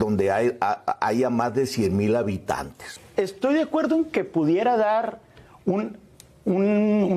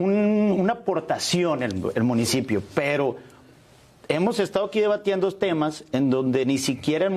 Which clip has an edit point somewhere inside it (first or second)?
first